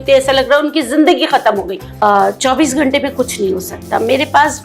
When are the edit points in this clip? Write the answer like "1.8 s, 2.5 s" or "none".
2.0 s